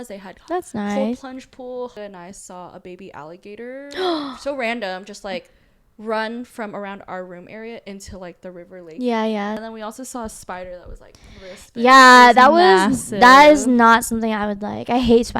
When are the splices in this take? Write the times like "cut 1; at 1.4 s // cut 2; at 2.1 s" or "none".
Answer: cut 1; at 1.9 s // cut 2; at 9.6 s